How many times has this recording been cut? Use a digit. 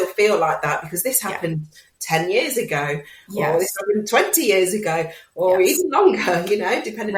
0